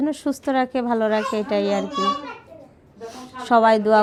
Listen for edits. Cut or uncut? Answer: uncut